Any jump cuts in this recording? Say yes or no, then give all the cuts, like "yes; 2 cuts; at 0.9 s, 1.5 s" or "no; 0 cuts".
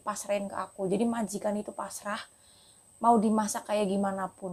no; 0 cuts